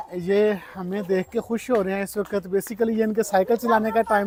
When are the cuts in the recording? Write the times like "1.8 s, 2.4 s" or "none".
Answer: none